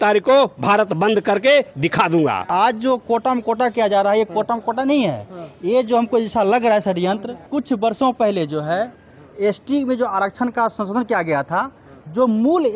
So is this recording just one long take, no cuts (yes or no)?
no